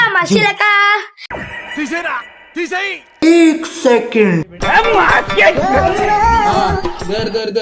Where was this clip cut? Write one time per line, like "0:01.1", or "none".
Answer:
0:01.1
0:03.1